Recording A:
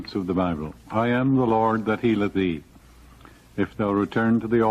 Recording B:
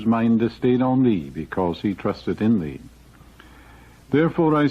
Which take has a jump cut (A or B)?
B